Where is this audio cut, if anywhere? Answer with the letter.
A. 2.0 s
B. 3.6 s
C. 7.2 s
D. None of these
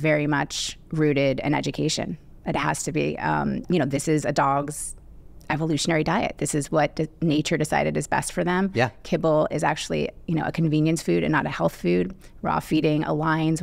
B